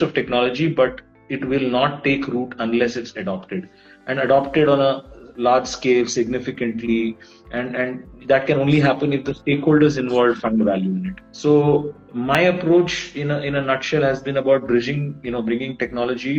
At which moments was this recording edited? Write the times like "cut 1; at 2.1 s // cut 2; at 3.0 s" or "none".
none